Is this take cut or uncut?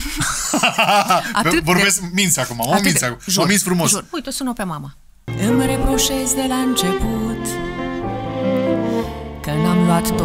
cut